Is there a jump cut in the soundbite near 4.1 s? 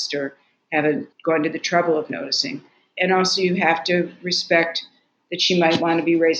no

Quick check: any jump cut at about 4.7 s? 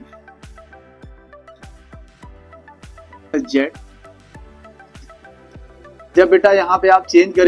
no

